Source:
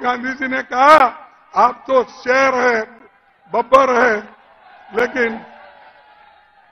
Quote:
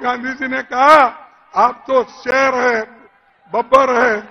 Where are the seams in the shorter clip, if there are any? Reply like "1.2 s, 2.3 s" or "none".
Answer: none